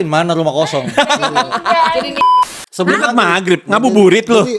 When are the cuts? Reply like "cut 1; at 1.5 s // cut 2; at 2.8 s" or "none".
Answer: cut 1; at 2.2 s